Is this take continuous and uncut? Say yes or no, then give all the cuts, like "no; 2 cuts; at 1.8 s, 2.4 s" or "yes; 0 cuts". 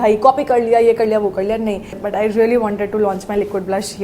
no; 1 cut; at 2.0 s